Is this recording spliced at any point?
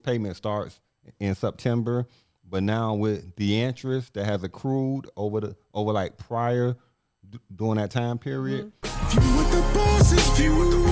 yes; 1 cut; at 8.8 s

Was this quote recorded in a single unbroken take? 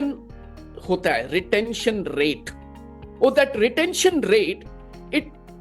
yes; 0 cuts

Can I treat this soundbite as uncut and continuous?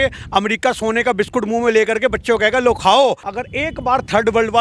no; 1 cut; at 3.2 s

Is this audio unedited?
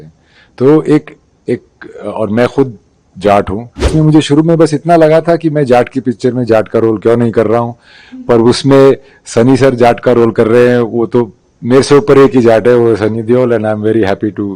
no; 1 cut; at 3.9 s

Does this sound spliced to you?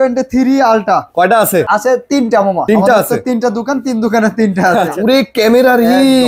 yes; 3 cuts; at 1.7 s, 2.6 s, 4.9 s

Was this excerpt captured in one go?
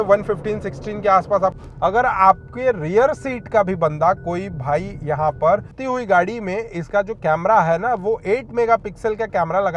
no; 2 cuts; at 1.6 s, 5.8 s

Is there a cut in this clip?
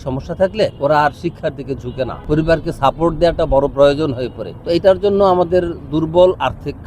yes; 1 cut; at 4.5 s

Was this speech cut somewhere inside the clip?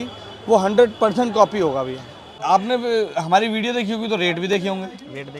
yes; 1 cut; at 2.3 s

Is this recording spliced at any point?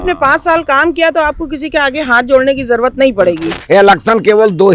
yes; 1 cut; at 3.5 s

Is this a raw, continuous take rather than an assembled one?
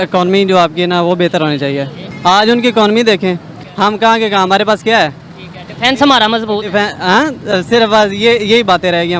no; 1 cut; at 2.1 s

